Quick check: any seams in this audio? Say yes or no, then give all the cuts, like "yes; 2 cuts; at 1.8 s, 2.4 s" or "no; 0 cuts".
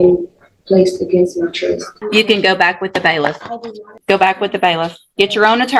yes; 2 cuts; at 1.9 s, 3.9 s